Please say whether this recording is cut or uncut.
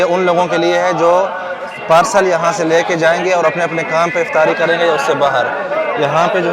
uncut